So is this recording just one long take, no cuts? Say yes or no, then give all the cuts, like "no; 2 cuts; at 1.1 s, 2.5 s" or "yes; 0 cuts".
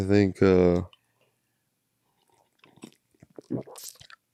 yes; 0 cuts